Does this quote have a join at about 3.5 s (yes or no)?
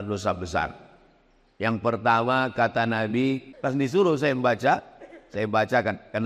yes